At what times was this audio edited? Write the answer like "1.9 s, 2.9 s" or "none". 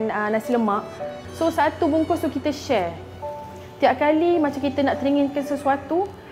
1.1 s

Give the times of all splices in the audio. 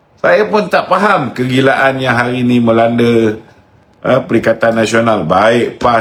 none

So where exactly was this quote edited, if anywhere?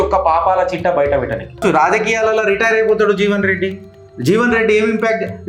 1.6 s

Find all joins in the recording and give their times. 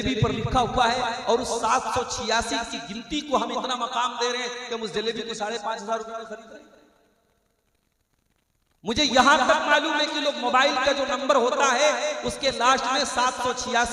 none

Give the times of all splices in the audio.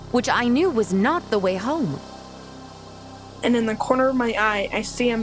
2.7 s

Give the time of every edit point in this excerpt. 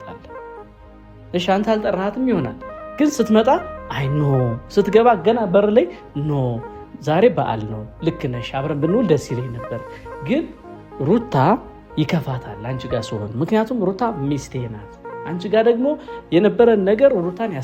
none

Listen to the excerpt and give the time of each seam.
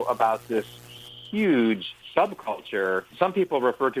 1.9 s

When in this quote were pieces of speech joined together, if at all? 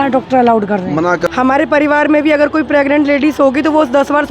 1.3 s

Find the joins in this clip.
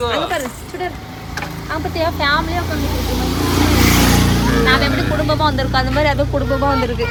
none

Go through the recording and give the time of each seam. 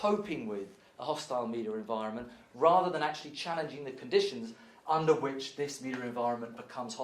none

